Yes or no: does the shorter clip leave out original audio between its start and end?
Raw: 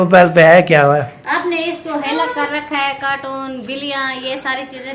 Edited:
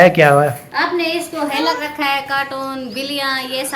yes